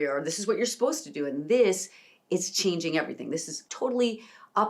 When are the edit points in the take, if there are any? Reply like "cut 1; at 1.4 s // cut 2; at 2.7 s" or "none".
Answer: cut 1; at 3.7 s